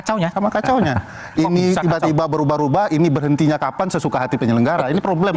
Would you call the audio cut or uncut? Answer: uncut